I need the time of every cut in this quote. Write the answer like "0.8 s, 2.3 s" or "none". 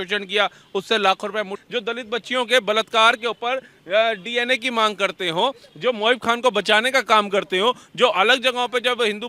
1.6 s